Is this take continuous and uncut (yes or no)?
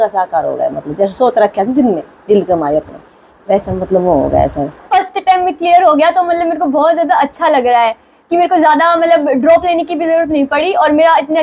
no